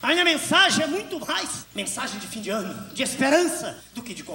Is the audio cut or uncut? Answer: uncut